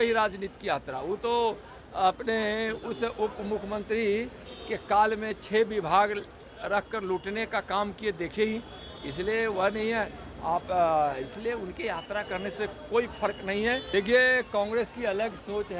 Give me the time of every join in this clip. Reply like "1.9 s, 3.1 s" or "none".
13.8 s